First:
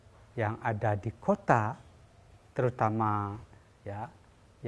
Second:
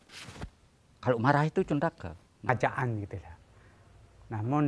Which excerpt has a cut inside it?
second; 1 cut; at 2.2 s

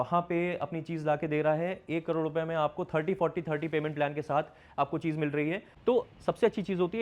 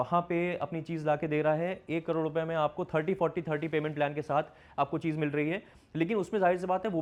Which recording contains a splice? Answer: first; 1 cut; at 5.7 s

